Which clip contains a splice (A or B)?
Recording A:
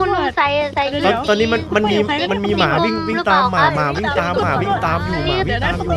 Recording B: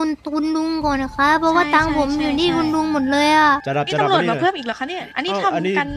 B